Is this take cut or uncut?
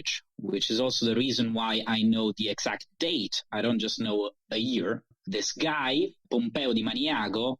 cut